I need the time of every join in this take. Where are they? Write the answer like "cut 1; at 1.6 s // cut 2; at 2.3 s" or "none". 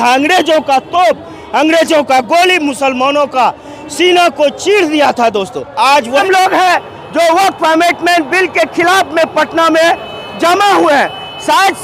cut 1; at 6.2 s